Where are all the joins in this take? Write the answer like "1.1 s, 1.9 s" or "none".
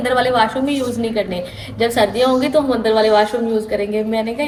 none